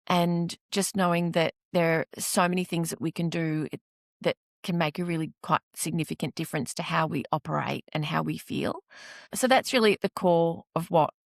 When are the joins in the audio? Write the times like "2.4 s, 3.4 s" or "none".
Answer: 9.2 s